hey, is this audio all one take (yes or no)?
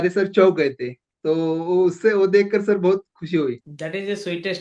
no